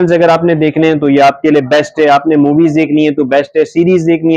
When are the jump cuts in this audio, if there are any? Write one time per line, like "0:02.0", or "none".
none